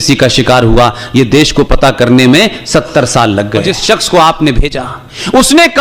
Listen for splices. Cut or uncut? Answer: cut